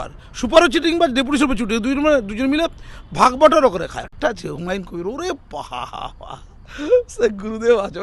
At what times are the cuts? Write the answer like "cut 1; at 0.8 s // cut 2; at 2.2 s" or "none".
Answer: cut 1; at 4.1 s